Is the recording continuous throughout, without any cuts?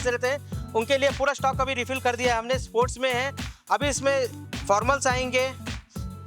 yes; 0 cuts

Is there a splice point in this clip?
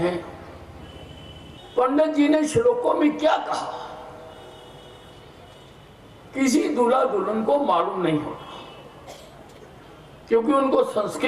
yes; 1 cut; at 1.6 s

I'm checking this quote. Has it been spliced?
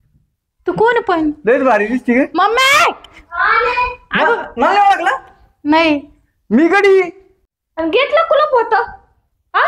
yes; 1 cut; at 7.5 s

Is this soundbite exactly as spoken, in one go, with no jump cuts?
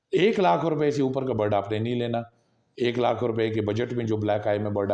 yes; 0 cuts

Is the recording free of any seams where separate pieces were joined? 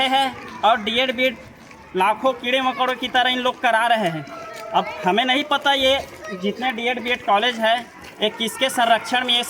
yes; 0 cuts

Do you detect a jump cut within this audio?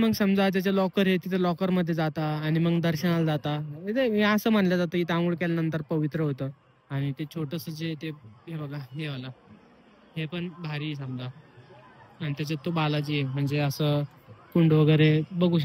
no; 0 cuts

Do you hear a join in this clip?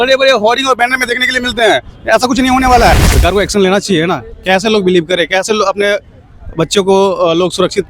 yes; 1 cut; at 3.1 s

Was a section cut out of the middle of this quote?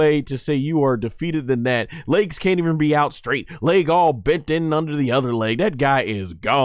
no; 0 cuts

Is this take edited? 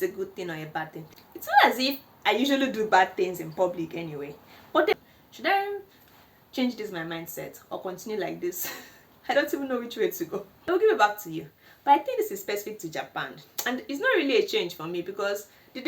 yes; 3 cuts; at 1.0 s, 4.9 s, 10.8 s

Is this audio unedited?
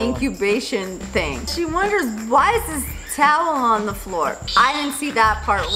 no; 2 cuts; at 1.5 s, 4.4 s

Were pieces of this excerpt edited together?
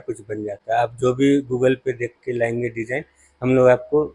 no; 0 cuts

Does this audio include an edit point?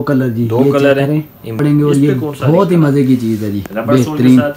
yes; 1 cut; at 1.6 s

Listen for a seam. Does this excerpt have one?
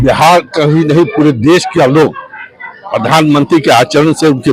no; 0 cuts

